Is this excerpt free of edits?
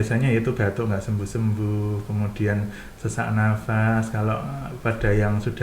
yes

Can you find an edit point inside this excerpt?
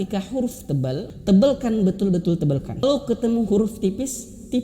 yes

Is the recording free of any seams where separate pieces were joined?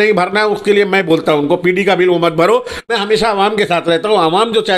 no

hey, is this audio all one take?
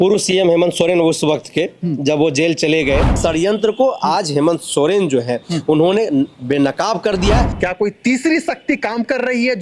no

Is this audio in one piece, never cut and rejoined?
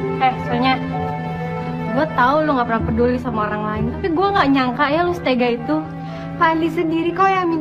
no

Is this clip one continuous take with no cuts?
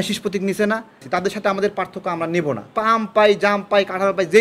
no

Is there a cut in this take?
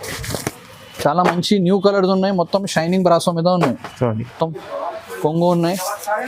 yes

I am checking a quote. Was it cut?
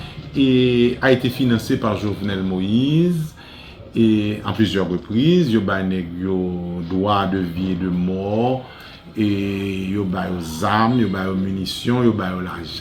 no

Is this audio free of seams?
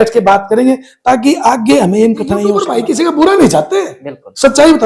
no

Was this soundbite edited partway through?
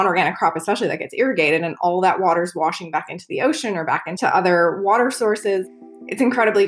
yes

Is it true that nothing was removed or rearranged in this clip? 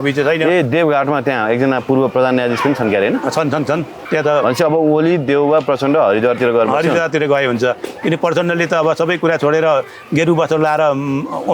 no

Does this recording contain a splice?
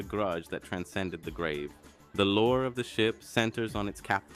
yes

